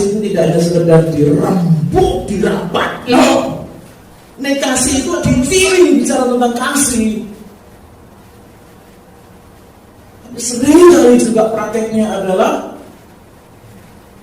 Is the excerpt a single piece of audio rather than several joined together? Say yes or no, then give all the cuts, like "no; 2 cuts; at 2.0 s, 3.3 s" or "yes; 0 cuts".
no; 1 cut; at 5.7 s